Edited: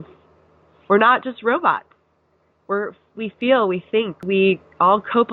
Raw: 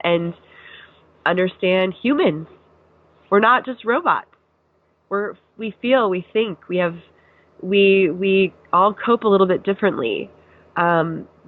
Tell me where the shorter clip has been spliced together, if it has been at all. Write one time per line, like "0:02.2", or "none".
0:04.2